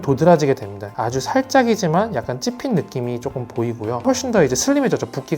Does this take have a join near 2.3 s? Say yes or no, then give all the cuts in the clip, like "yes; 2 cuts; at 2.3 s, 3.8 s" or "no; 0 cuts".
no; 1 cut; at 4.0 s